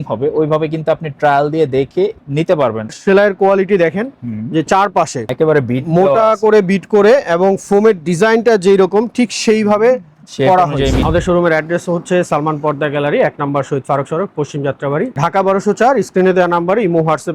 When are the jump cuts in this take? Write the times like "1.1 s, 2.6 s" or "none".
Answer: 2.9 s, 11.0 s